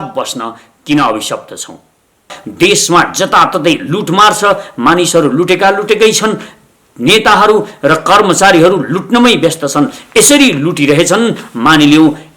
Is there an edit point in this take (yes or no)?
yes